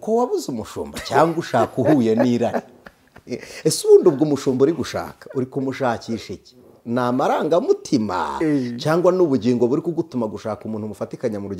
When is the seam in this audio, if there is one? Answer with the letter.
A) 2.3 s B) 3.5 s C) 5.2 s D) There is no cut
D